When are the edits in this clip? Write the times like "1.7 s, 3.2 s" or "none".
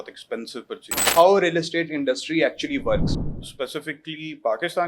1.1 s, 3.2 s